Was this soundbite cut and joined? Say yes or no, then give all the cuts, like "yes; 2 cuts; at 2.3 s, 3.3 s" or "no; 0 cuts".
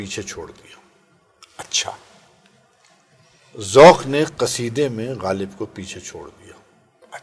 no; 0 cuts